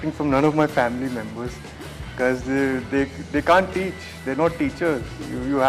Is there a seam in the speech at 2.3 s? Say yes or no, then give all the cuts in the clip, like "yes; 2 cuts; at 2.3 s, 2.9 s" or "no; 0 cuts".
no; 0 cuts